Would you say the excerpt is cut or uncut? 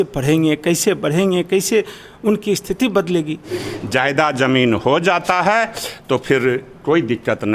cut